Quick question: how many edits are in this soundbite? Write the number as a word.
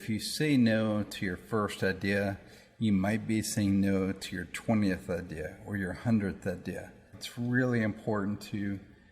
one